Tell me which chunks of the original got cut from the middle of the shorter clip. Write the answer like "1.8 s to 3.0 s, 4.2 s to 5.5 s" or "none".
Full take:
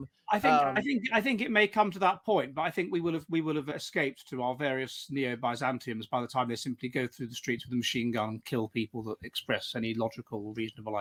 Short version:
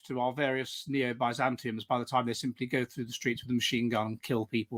none